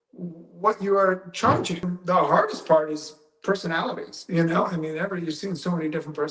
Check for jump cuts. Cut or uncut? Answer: cut